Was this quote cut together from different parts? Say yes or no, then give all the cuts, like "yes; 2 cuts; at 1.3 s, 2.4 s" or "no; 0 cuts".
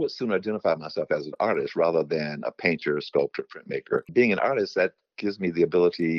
yes; 1 cut; at 4.1 s